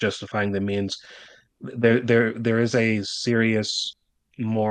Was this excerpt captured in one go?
yes; 0 cuts

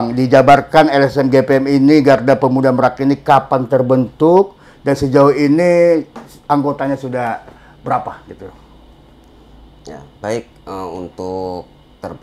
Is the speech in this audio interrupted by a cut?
no; 0 cuts

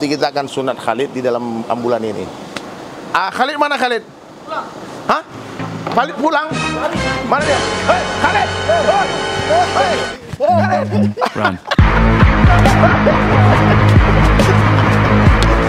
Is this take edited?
no; 0 cuts

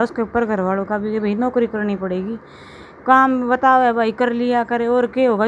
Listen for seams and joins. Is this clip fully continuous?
yes; 0 cuts

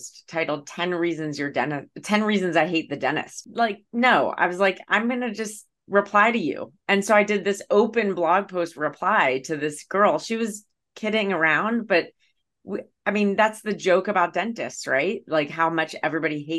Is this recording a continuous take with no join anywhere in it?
no; 1 cut; at 3.4 s

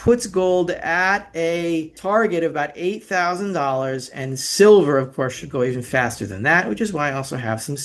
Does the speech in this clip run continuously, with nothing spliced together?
no; 1 cut; at 1.9 s

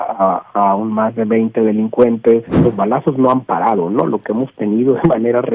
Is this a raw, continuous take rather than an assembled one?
no; 1 cut; at 2.5 s

